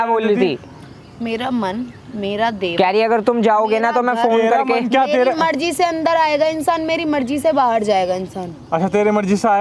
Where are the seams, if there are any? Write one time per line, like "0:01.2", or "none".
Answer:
none